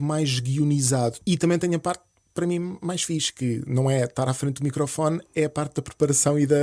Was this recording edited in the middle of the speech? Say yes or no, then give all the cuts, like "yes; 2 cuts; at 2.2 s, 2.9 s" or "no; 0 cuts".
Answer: yes; 1 cut; at 1.2 s